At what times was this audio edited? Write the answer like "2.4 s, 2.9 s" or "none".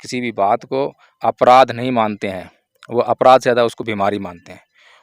none